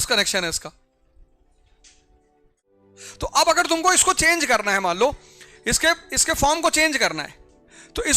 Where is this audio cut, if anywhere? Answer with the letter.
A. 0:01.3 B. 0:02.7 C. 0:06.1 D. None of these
B